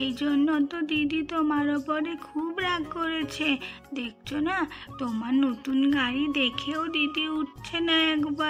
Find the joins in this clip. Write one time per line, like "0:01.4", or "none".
none